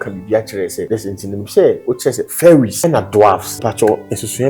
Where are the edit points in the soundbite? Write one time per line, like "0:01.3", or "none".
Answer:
0:00.8
0:02.7
0:03.5